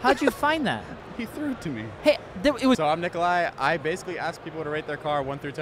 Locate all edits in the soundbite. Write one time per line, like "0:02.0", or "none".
0:01.4
0:02.8